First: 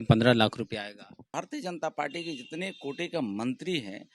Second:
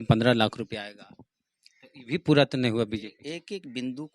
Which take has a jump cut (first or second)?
first